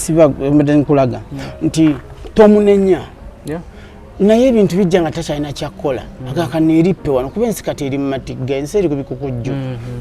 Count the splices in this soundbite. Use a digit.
0